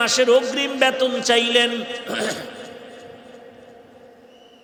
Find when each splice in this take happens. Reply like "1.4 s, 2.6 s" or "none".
none